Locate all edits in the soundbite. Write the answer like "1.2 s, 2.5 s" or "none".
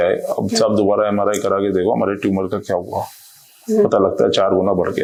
none